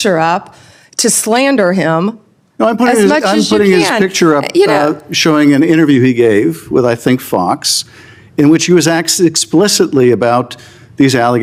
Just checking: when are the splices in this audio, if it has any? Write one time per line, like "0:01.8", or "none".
none

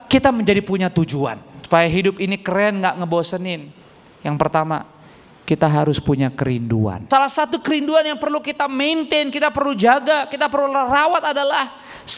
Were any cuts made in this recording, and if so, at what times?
0:01.5
0:07.0

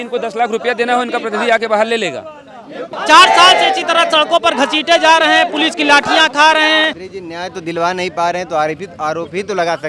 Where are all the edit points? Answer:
0:02.9
0:07.0

